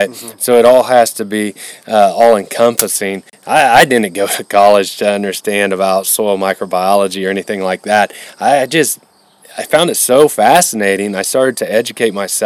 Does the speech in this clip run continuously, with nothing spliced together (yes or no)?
no